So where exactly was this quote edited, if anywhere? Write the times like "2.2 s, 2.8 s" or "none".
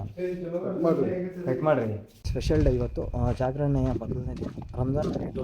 2.1 s